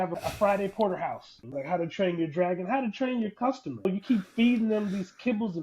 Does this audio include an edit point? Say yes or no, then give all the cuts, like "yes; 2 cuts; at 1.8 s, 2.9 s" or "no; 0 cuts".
yes; 2 cuts; at 1.4 s, 3.8 s